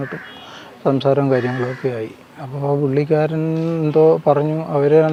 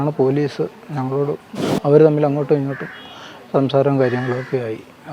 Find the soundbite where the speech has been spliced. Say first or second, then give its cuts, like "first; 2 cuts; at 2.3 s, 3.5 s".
second; 1 cut; at 1.5 s